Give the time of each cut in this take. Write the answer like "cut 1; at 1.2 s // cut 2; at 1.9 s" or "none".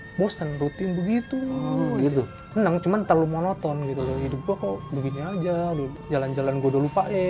cut 1; at 2.4 s // cut 2; at 6.0 s

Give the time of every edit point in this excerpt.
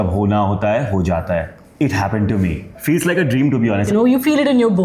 cut 1; at 3.9 s

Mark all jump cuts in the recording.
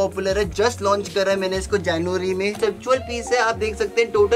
cut 1; at 2.6 s

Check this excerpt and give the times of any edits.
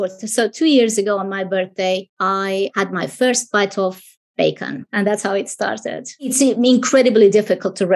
cut 1; at 2.6 s // cut 2; at 4.8 s // cut 3; at 6.3 s

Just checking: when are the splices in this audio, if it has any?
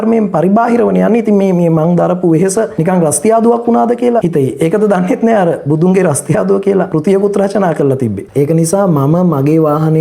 cut 1; at 2.7 s // cut 2; at 4.3 s // cut 3; at 6.9 s // cut 4; at 8.2 s

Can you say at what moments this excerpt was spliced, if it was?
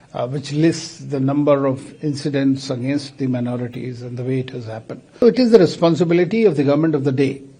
cut 1; at 5.2 s

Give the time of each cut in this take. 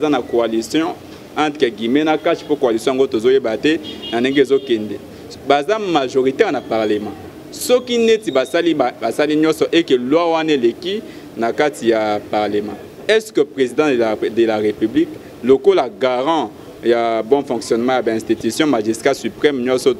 none

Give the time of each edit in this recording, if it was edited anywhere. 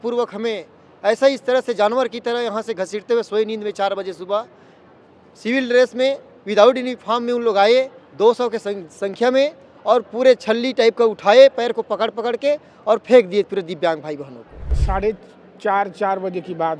cut 1; at 14.8 s

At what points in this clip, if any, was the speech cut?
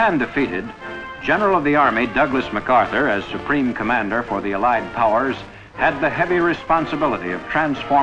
none

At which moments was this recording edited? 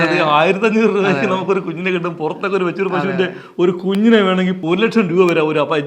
cut 1; at 4.6 s

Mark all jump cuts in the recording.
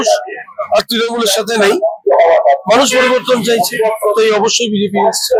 none

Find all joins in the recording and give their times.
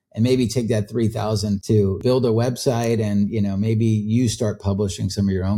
cut 1; at 1.9 s

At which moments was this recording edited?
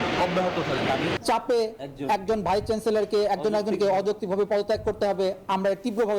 cut 1; at 1.0 s

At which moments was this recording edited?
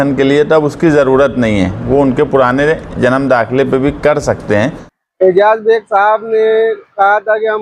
cut 1; at 4.9 s

